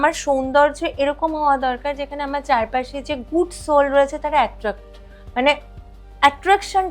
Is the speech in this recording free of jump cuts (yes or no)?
yes